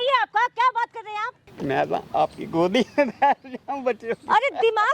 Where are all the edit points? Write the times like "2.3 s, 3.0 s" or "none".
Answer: 1.4 s